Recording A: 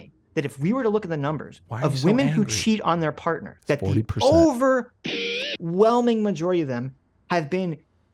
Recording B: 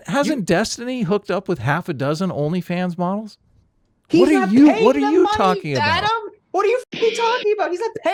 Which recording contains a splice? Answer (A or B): A